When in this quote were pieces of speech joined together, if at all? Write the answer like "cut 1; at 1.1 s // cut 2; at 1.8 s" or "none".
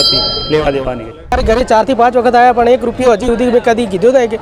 cut 1; at 1.3 s